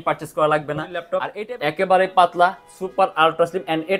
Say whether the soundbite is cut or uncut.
cut